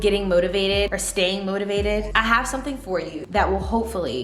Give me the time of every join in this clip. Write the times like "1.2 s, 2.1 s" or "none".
1.0 s, 2.1 s, 3.2 s